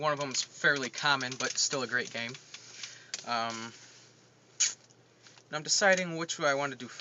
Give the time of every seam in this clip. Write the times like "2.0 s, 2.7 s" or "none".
5.8 s